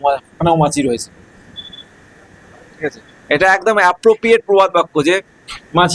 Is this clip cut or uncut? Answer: uncut